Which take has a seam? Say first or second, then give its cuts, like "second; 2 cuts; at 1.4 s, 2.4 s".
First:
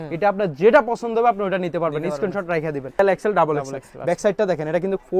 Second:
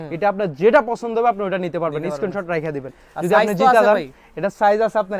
first; 1 cut; at 3.0 s